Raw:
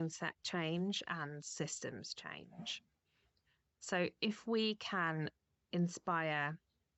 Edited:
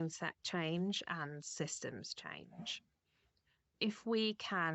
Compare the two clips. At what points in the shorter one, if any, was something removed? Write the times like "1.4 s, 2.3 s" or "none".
3.7 s